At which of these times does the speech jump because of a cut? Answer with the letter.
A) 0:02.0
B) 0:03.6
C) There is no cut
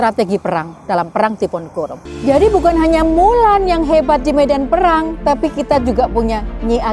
A